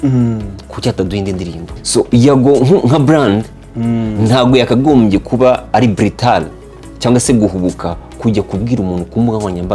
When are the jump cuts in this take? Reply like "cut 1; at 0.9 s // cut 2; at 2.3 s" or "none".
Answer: cut 1; at 1.7 s

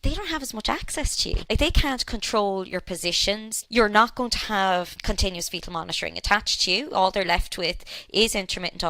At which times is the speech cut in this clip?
cut 1; at 1.4 s // cut 2; at 3.5 s // cut 3; at 5.0 s

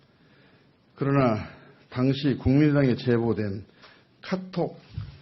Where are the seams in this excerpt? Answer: cut 1; at 2.1 s

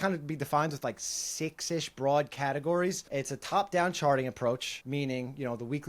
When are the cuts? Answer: cut 1; at 3.0 s // cut 2; at 4.7 s

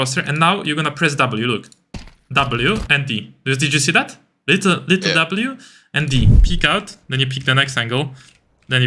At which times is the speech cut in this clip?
cut 1; at 6.4 s

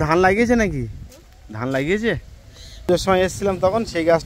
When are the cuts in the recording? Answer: cut 1; at 2.9 s

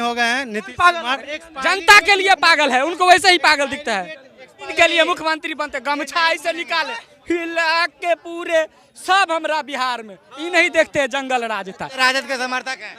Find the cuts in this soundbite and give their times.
cut 1; at 1.4 s // cut 2; at 4.7 s // cut 3; at 12.0 s

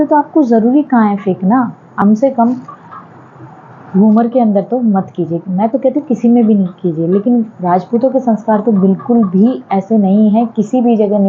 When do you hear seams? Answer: cut 1; at 1.9 s

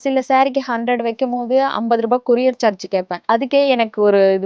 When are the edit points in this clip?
cut 1; at 3.2 s

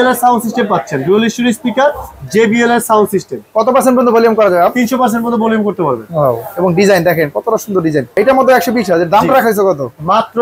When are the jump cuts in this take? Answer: cut 1; at 8.2 s

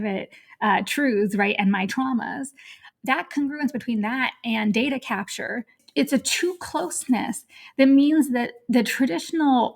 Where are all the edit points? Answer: cut 1; at 2.9 s // cut 2; at 5.8 s

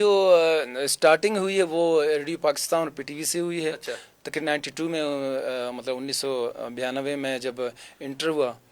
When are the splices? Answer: none

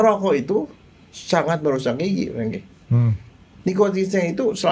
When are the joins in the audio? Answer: cut 1; at 3.5 s

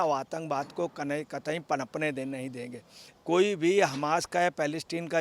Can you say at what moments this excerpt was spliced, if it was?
cut 1; at 3.1 s

